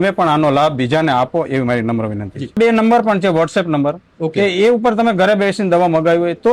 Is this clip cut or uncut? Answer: cut